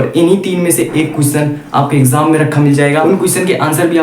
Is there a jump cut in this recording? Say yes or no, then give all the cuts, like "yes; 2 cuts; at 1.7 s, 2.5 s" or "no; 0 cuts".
yes; 1 cut; at 3.0 s